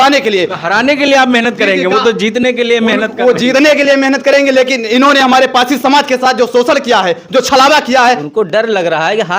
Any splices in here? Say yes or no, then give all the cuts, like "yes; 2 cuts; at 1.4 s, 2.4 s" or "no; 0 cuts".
yes; 1 cut; at 8.2 s